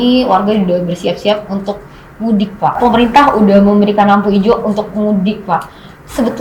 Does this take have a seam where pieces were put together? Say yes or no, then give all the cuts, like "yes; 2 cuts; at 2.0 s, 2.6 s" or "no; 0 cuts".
yes; 1 cut; at 2.8 s